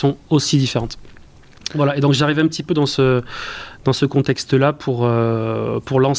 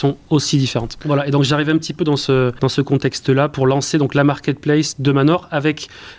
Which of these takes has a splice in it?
second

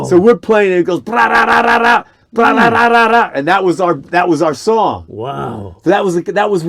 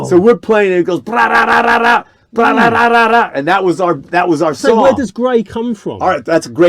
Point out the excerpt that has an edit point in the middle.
second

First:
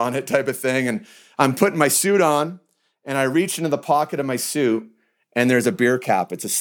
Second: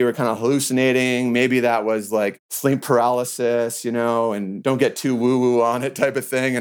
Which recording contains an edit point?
second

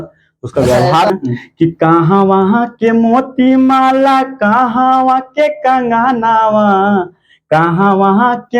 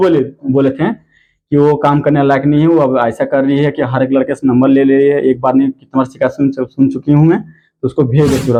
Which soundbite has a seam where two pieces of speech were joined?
first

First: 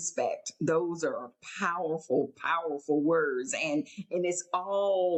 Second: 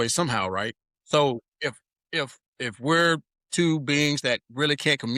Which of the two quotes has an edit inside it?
second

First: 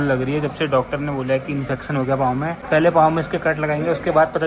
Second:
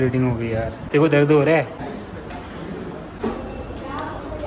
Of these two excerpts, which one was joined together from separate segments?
second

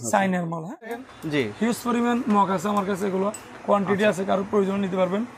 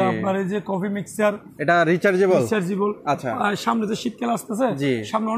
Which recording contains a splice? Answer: first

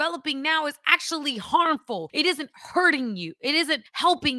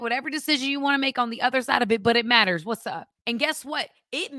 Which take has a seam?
second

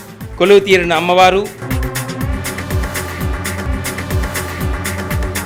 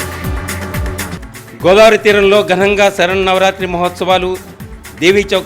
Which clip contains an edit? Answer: second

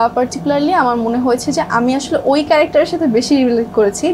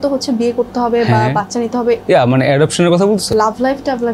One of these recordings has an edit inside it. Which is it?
second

